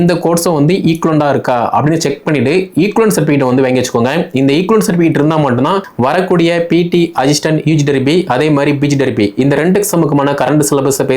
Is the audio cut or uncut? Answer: cut